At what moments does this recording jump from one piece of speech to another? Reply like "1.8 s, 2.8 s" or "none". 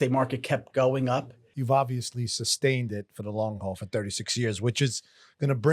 1.5 s